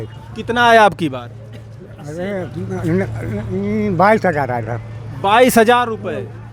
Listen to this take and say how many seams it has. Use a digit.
0